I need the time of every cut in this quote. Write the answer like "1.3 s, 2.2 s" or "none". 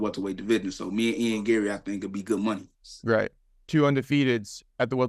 none